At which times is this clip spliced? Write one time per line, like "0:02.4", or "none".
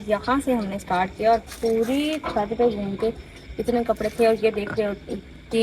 none